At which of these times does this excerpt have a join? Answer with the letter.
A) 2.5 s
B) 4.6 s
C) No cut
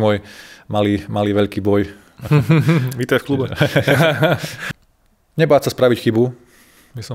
B